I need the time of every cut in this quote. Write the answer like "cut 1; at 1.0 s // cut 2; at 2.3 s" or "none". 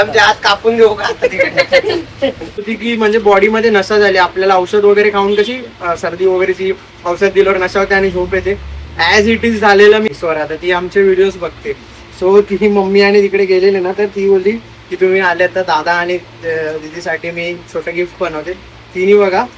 cut 1; at 2.7 s // cut 2; at 10.1 s

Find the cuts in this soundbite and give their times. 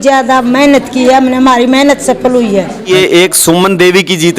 cut 1; at 2.8 s

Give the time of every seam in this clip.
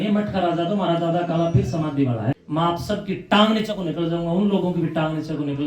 cut 1; at 2.3 s

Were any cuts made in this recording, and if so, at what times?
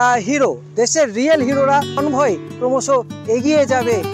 cut 1; at 2.0 s

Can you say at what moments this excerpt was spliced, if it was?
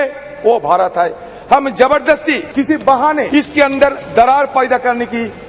cut 1; at 2.4 s // cut 2; at 3.3 s

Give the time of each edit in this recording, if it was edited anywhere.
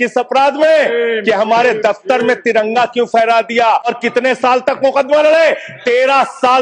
cut 1; at 3.9 s

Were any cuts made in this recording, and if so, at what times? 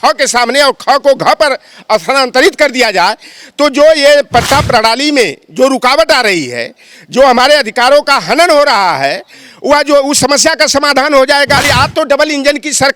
cut 1; at 11.6 s

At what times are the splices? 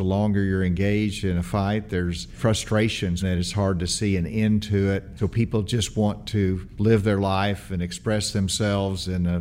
cut 1; at 2.4 s // cut 2; at 3.2 s // cut 3; at 5.1 s // cut 4; at 6.7 s

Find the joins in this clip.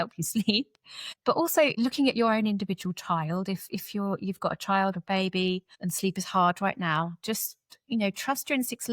cut 1; at 1.7 s

